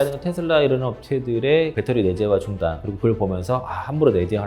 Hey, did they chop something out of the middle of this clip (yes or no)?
yes